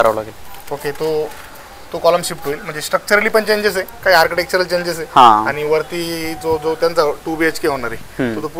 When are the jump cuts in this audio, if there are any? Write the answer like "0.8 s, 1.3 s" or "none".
none